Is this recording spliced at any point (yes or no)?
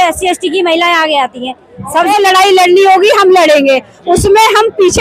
yes